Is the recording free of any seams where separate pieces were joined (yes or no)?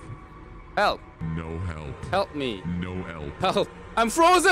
no